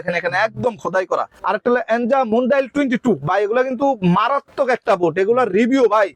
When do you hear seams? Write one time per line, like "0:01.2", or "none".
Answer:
0:01.3

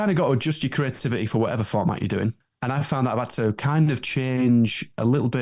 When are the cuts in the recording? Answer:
0:02.4

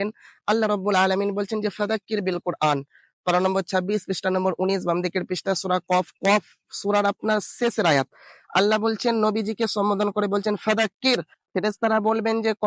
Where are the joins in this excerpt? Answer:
0:11.4

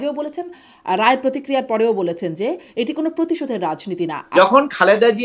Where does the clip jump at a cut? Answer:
0:04.2

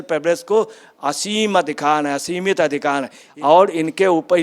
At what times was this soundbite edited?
0:03.2

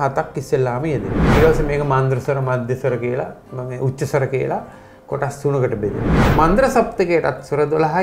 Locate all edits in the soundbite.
0:01.1
0:06.1

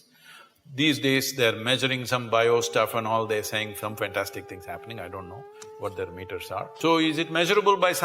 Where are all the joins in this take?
0:06.7

